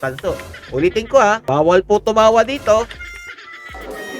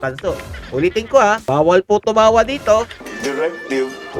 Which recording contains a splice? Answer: second; 1 cut; at 3.0 s

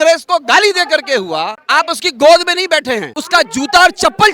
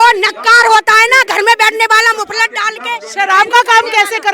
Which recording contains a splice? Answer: first; 1 cut; at 3.1 s

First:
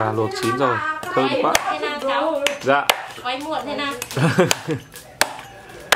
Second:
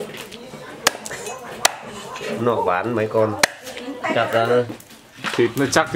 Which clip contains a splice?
second; 1 cut; at 4.0 s

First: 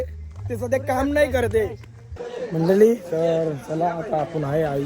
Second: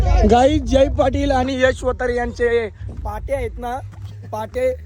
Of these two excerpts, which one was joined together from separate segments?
first; 1 cut; at 2.2 s

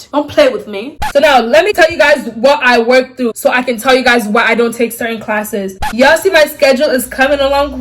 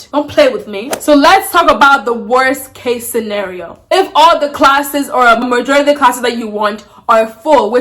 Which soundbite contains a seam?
first; 2 cuts; at 1.0 s, 5.8 s

